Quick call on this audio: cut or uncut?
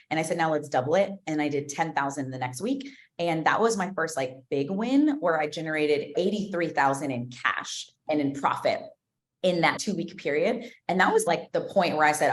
cut